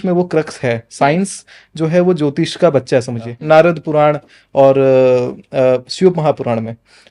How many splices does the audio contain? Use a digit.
1